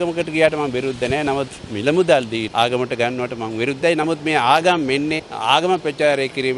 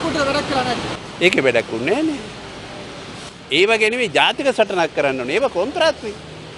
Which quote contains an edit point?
first; 2 cuts; at 2.5 s, 5.3 s

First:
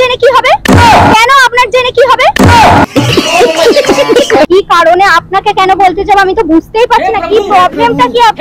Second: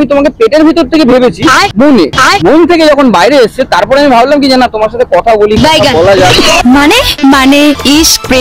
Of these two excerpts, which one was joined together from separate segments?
first; 1 cut; at 4.5 s

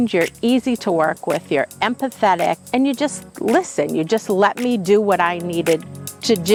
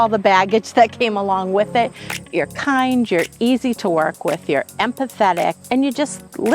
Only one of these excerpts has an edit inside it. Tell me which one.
second; 1 cut; at 2.1 s

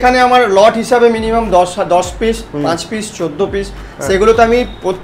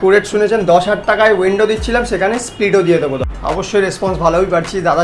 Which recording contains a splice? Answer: second; 1 cut; at 3.2 s

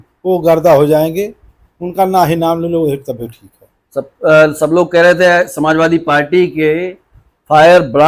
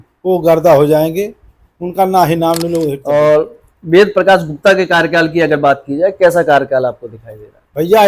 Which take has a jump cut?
second; 1 cut; at 3.0 s

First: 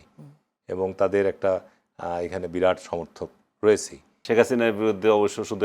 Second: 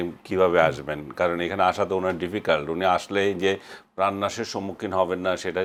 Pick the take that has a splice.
first; 1 cut; at 4.1 s

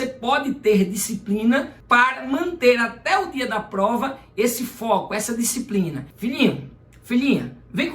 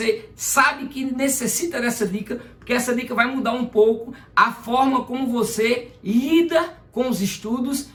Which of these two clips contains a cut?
first; 2 cuts; at 1.8 s, 6.1 s

